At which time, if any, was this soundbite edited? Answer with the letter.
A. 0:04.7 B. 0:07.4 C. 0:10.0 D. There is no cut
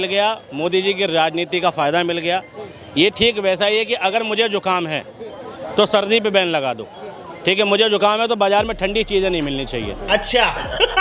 C